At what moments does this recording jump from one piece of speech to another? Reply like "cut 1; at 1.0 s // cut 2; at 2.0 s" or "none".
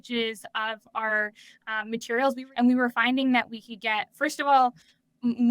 cut 1; at 2.4 s